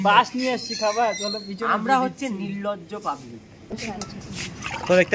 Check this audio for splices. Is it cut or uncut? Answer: cut